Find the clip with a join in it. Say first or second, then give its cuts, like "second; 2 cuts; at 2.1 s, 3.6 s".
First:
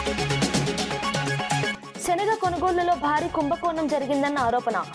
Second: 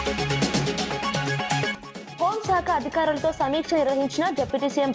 first; 1 cut; at 1.8 s